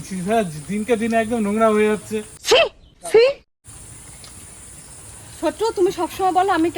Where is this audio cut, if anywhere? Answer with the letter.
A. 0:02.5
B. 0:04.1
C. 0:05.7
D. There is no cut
D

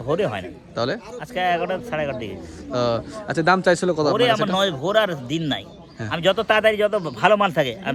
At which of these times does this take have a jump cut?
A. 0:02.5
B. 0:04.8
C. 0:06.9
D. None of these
D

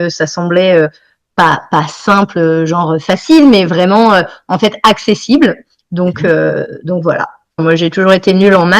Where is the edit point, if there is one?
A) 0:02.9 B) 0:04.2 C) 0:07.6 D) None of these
C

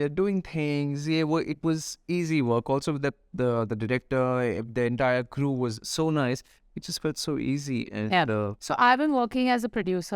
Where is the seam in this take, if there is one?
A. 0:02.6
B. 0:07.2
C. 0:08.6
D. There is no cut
C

